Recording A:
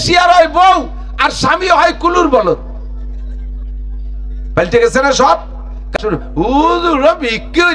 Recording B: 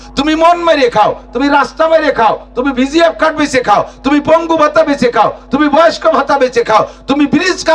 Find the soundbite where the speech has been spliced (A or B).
A